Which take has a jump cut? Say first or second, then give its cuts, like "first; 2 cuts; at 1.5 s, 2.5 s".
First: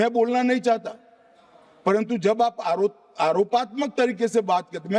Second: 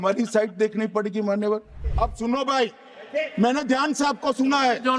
second; 1 cut; at 1.8 s